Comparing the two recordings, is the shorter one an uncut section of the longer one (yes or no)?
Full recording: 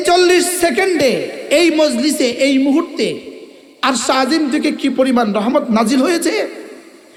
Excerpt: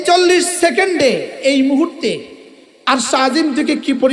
no